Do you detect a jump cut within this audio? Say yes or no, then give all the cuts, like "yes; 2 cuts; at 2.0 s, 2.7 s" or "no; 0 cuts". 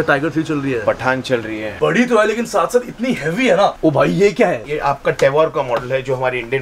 yes; 2 cuts; at 1.7 s, 3.8 s